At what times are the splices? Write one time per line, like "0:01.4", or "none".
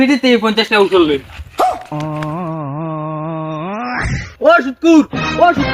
0:04.2